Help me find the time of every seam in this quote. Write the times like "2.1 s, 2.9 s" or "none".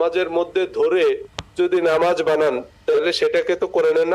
2.3 s